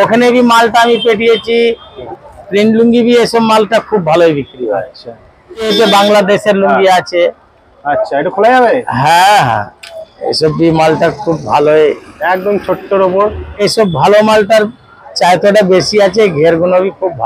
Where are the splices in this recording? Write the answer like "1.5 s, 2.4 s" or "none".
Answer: 2.0 s, 5.7 s, 13.5 s